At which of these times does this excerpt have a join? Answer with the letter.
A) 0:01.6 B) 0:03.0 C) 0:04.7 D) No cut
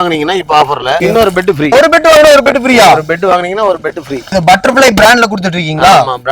D